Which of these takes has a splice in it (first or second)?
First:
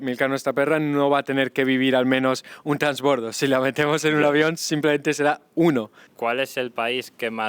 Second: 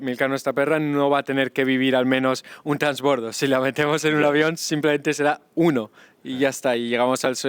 first